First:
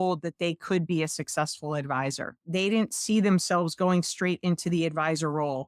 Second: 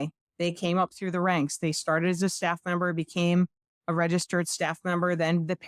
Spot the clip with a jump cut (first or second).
first